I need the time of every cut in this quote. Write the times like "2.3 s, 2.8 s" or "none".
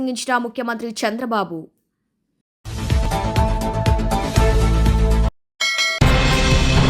5.5 s